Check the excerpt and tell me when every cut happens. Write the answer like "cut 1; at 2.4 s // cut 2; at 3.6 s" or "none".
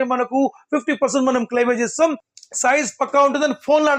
cut 1; at 2.3 s